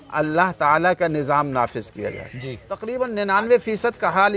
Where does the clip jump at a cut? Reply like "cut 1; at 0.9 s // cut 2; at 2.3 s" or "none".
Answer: cut 1; at 2.7 s